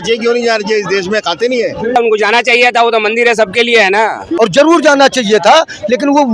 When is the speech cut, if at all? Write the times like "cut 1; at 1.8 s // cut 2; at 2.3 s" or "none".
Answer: cut 1; at 1.9 s // cut 2; at 4.3 s